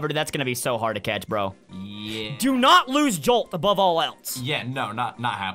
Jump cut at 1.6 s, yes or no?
no